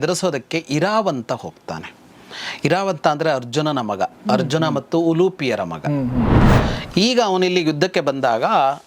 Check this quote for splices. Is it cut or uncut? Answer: cut